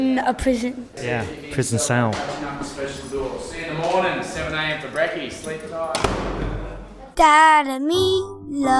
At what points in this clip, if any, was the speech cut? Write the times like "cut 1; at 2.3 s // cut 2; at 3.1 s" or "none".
cut 1; at 0.9 s // cut 2; at 7.0 s